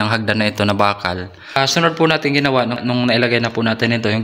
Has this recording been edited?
yes; 2 cuts; at 1.6 s, 2.8 s

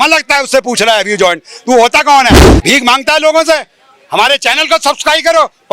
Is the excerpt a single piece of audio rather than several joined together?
no; 1 cut; at 2.5 s

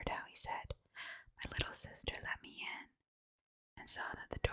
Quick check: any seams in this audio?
no; 0 cuts

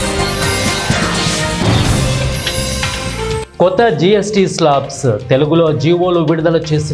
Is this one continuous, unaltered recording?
no; 1 cut; at 3.5 s

